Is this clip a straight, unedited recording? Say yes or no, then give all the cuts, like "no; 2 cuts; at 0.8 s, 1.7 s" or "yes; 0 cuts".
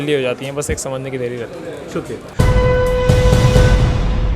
yes; 0 cuts